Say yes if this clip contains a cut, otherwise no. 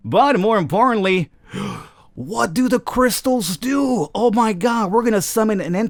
no